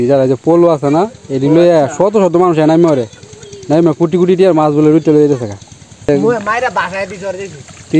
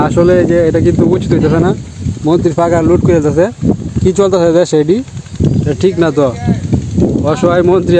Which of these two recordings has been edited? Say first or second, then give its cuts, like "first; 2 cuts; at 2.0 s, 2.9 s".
first; 1 cut; at 6.1 s